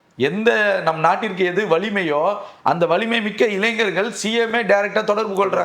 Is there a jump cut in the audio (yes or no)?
no